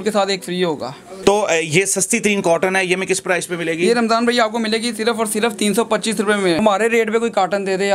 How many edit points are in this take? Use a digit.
2